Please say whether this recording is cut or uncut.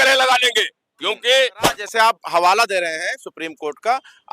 cut